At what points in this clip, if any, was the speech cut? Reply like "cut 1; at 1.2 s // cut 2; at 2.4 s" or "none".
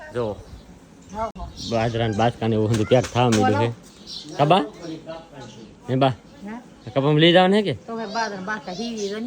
none